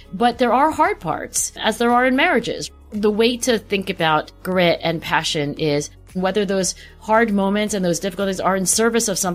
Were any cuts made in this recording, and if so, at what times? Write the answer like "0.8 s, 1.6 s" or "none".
2.6 s, 4.4 s, 6.2 s

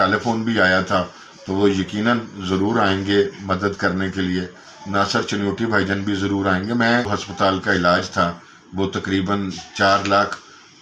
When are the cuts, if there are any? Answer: 7.2 s

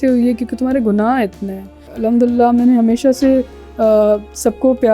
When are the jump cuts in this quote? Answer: 1.8 s

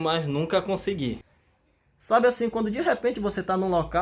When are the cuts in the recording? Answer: 1.3 s

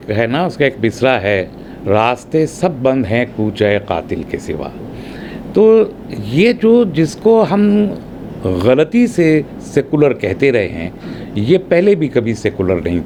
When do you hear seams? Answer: none

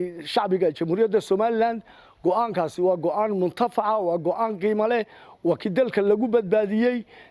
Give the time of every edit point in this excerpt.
none

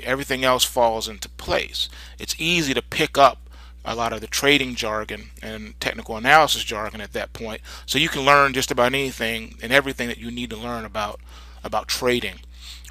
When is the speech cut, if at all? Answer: none

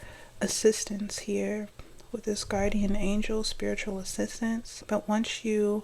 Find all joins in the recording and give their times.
4.7 s

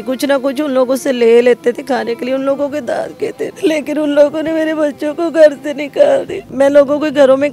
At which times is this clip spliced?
3.5 s, 6.4 s

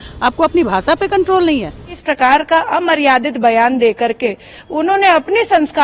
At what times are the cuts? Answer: 2.0 s

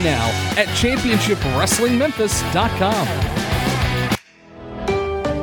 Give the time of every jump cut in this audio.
4.2 s

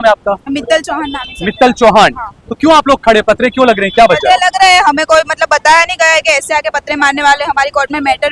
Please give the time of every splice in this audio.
none

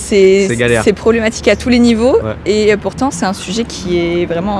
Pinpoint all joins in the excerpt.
none

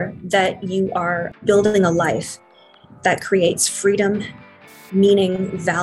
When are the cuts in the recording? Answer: 1.4 s

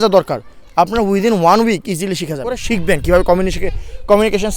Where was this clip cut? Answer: 2.6 s

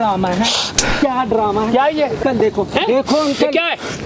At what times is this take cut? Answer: 2.2 s

